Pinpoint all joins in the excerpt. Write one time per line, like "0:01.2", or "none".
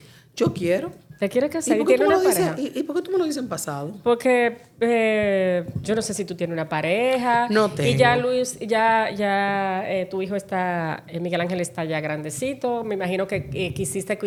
none